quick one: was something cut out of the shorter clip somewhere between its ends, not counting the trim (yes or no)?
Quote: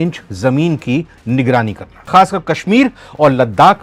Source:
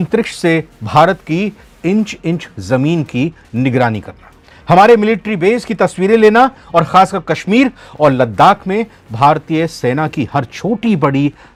yes